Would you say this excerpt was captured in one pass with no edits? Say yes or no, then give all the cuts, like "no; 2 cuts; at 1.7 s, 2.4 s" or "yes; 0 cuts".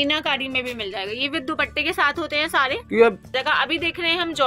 no; 1 cut; at 3.3 s